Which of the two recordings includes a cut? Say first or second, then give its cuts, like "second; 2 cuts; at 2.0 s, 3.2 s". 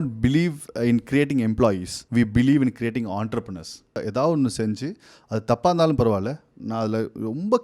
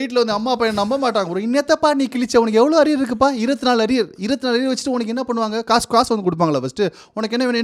first; 2 cuts; at 1.9 s, 4.0 s